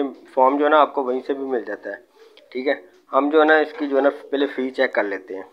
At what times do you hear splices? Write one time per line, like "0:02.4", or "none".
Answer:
none